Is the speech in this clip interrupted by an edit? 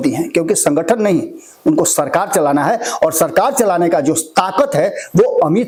no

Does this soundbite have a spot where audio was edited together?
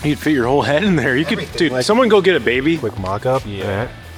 no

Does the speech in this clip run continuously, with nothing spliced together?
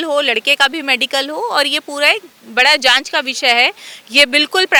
yes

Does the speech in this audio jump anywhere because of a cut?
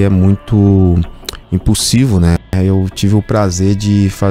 yes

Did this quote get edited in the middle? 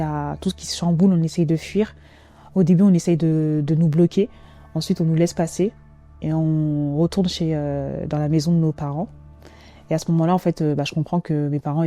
no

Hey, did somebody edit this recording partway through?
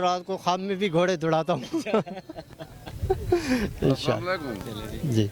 no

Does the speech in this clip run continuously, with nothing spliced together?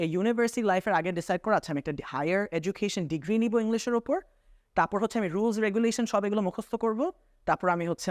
yes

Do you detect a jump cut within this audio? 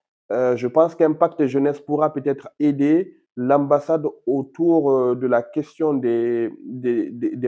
no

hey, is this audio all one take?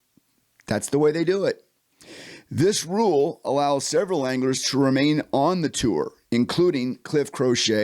yes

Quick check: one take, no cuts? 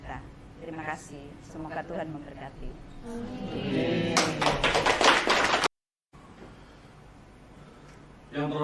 no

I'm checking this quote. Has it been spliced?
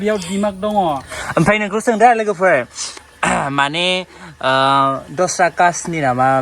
yes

